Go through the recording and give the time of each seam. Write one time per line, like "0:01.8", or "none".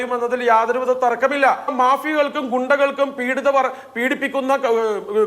0:01.7